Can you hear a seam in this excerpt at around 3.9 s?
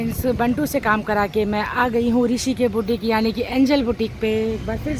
no; 0 cuts

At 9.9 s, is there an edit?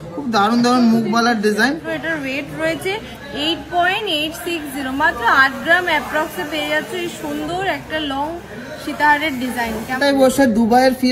yes; 2 cuts; at 1.8 s, 9.9 s

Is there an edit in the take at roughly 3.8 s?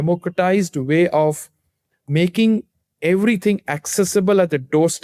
no; 1 cut; at 2.0 s

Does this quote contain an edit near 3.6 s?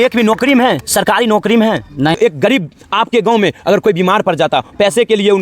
no; 1 cut; at 2.2 s

